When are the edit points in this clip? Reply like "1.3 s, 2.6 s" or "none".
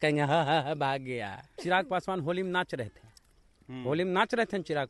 1.6 s